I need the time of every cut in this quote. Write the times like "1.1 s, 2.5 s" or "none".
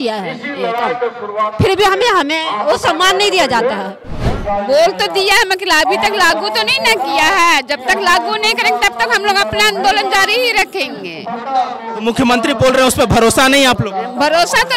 4.3 s